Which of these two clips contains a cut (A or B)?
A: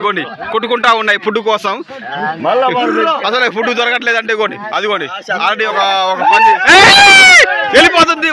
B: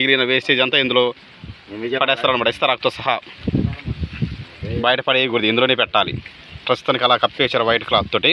A